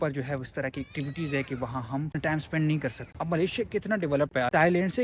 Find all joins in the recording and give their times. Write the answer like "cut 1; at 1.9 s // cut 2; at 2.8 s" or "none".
none